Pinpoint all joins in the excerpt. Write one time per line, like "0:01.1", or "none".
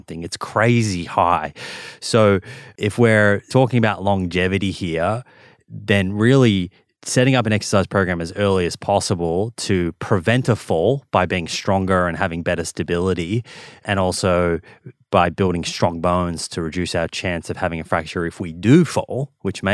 0:03.4